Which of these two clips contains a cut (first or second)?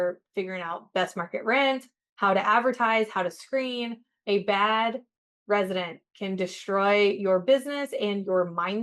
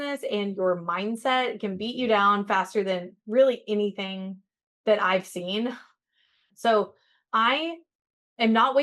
second